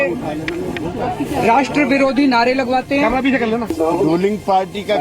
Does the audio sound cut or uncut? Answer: cut